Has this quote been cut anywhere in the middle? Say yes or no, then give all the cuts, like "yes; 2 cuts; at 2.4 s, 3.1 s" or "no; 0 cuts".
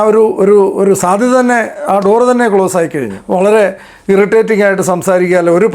yes; 1 cut; at 3.1 s